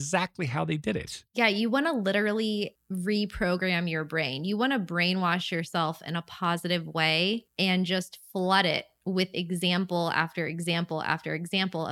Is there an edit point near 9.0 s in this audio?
no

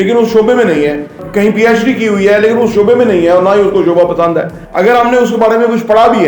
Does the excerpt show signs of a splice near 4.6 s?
yes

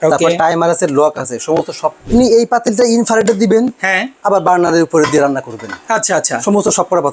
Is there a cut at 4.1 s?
no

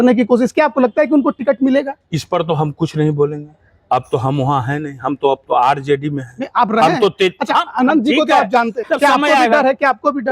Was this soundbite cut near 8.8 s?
yes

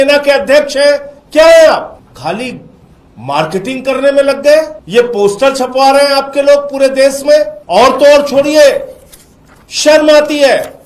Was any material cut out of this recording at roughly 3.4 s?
no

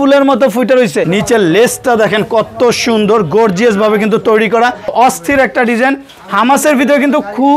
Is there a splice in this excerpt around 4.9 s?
yes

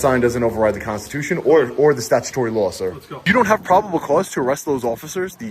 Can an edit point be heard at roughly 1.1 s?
no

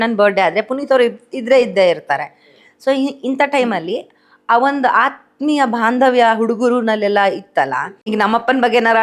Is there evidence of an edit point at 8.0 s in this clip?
yes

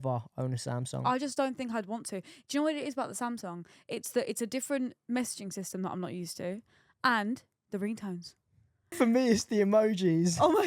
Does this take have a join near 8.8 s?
yes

